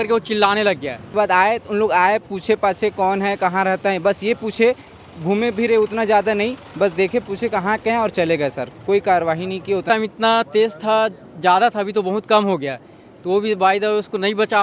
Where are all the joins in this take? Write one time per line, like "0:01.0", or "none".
0:01.1
0:09.8